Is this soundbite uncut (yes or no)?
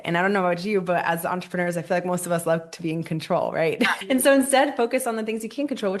no